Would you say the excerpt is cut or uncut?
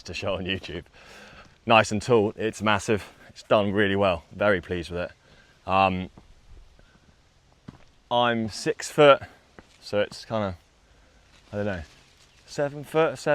uncut